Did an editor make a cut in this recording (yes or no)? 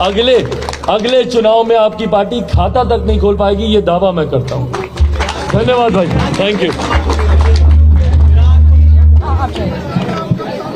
no